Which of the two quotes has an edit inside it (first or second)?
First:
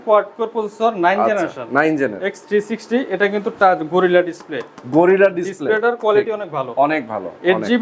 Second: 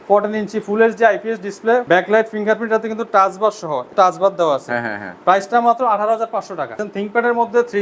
second